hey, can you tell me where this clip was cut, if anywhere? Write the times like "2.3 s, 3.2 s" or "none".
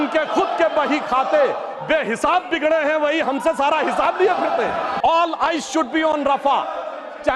4.9 s

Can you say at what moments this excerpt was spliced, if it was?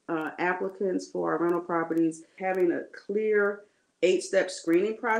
2.3 s

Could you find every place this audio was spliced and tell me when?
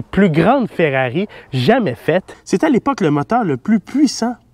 2.4 s

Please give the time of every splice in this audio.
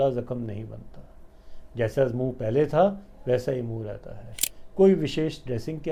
none

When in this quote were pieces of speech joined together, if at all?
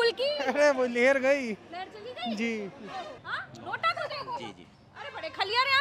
3.2 s

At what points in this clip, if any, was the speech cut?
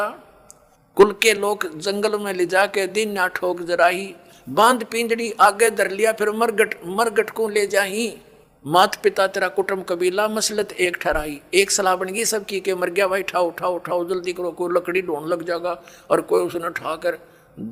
none

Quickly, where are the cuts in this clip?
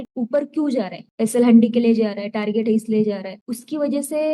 none

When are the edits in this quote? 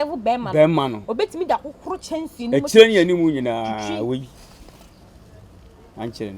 none

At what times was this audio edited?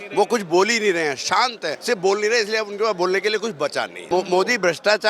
1.7 s, 4.0 s

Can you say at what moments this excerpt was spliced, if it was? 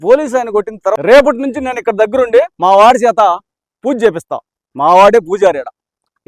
0.9 s

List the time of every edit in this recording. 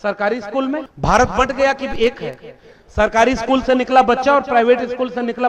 0.9 s

